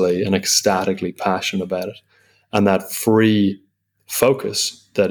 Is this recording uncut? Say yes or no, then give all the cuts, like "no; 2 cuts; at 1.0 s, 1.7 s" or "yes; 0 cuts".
yes; 0 cuts